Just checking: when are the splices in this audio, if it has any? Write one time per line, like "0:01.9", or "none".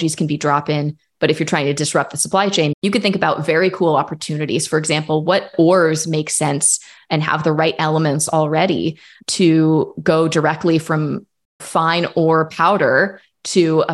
0:02.8